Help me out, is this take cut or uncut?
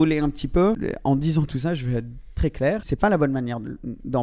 cut